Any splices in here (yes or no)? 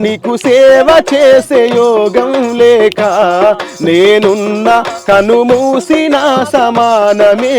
no